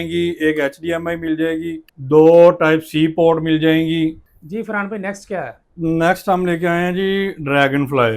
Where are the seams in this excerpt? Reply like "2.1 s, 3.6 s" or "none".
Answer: none